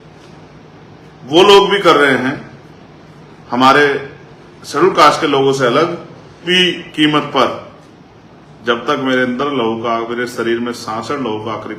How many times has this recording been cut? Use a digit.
1